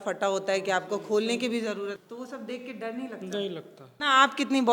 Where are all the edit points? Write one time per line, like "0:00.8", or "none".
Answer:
0:02.0
0:03.8